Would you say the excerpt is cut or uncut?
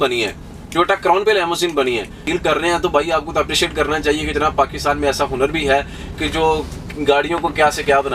cut